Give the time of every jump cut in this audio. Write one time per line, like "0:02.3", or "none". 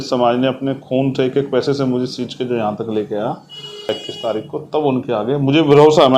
0:04.0